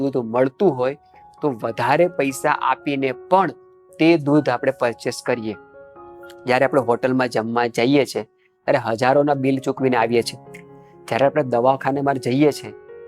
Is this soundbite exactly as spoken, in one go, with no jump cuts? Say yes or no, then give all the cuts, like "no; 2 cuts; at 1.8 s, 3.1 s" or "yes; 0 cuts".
yes; 0 cuts